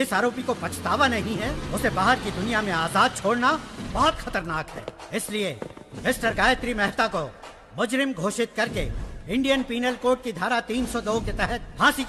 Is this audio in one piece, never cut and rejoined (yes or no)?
yes